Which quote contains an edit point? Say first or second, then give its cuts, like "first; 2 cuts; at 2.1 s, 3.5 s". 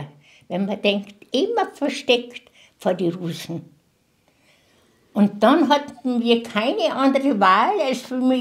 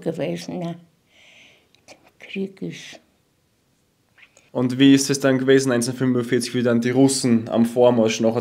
second; 1 cut; at 4.4 s